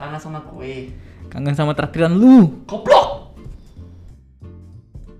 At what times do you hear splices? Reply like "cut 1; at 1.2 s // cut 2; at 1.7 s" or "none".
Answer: none